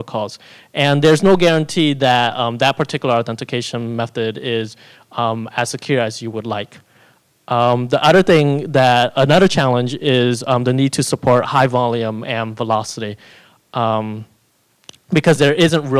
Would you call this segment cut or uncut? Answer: cut